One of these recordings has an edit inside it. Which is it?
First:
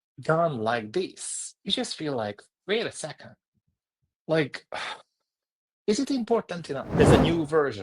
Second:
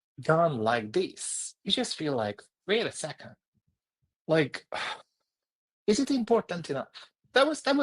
first; 1 cut; at 6.8 s

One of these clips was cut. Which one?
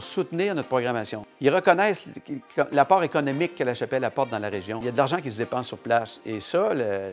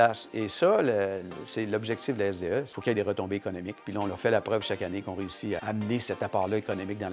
first; 2 cuts; at 1.2 s, 4.8 s

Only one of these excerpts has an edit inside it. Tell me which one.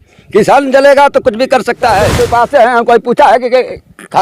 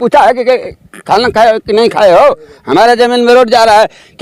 first; 1 cut; at 2.1 s

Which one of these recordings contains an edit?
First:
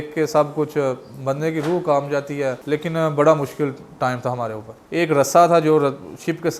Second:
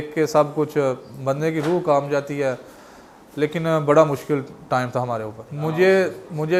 first; 2 cuts; at 2.6 s, 4.8 s

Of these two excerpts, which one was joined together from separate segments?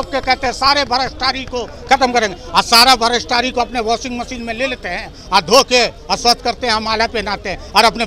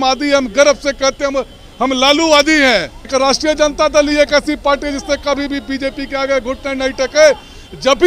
second; 1 cut; at 3.1 s

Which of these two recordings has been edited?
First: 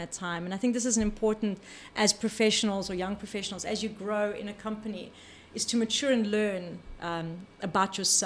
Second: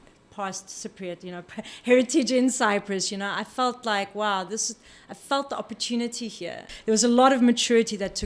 second; 1 cut; at 6.7 s

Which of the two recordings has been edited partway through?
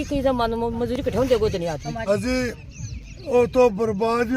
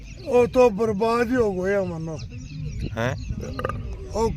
first; 1 cut; at 2.0 s

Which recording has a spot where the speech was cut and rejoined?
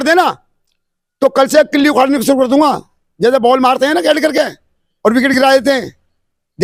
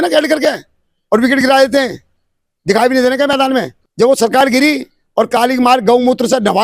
second; 1 cut; at 3.8 s

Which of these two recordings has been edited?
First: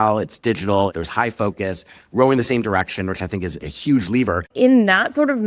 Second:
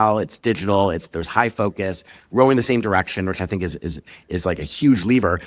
first; 3 cuts; at 0.9 s, 3.7 s, 4.5 s

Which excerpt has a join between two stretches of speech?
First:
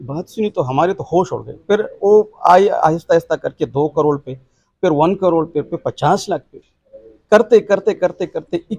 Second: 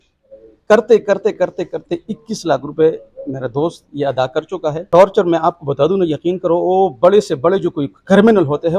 second; 1 cut; at 4.8 s

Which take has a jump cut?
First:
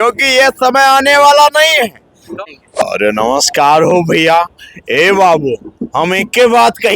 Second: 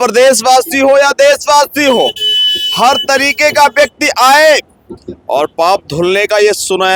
first; 1 cut; at 2.4 s

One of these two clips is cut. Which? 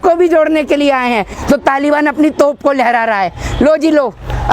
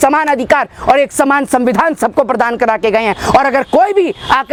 first; 1 cut; at 1.4 s

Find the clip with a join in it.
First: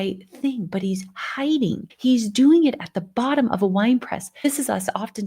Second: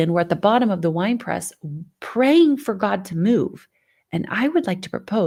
first; 2 cuts; at 1.9 s, 4.4 s

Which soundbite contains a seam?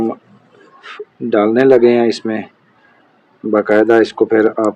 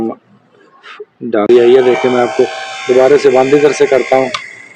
second; 1 cut; at 1.5 s

